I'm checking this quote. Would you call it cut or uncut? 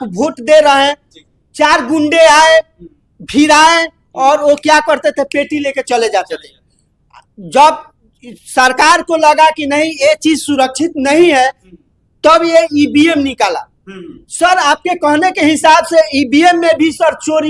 uncut